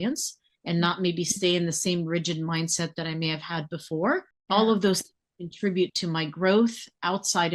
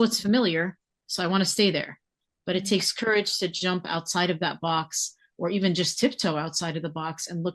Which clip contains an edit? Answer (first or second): first